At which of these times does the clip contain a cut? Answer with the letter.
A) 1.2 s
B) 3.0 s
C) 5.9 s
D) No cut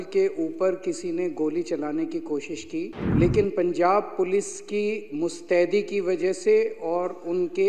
B